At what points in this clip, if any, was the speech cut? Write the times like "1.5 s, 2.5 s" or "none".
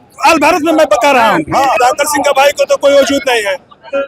1.8 s